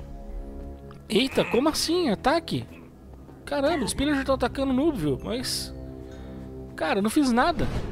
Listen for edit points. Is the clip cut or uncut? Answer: cut